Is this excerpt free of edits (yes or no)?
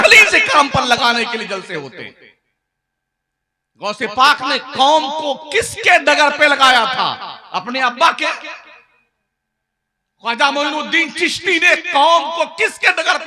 yes